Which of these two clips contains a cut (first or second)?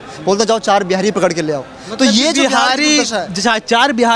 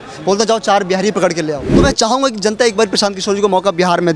second